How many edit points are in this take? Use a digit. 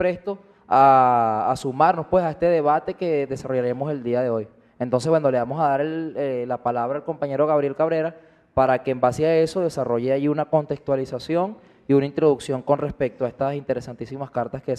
1